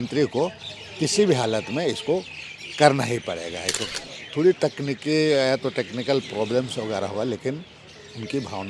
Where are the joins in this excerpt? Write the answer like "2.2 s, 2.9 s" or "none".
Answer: 3.8 s